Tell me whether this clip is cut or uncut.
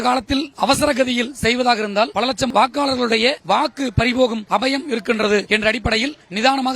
uncut